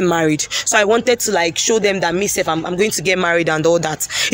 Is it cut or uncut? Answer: uncut